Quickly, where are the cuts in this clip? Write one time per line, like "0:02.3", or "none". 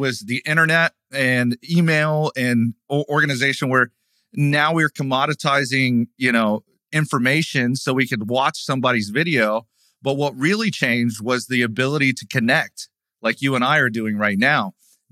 none